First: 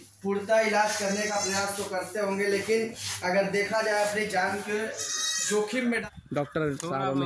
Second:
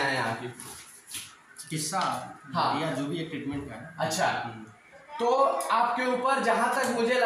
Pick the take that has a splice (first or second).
first